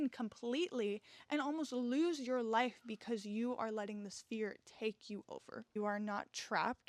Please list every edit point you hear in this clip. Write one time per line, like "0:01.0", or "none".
0:05.8